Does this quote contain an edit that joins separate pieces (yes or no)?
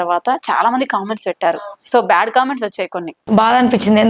yes